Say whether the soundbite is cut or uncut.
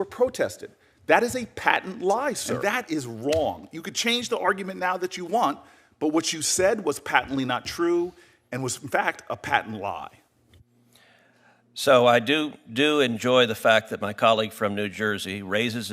cut